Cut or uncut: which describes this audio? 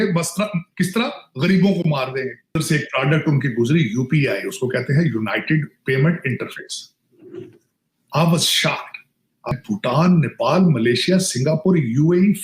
cut